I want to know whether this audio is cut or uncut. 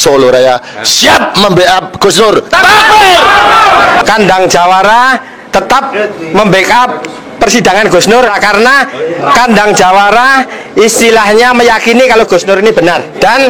cut